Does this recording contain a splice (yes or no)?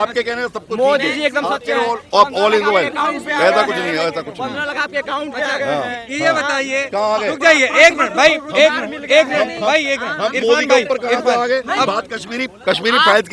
no